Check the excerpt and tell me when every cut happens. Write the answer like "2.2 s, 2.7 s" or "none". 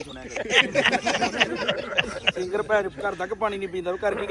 none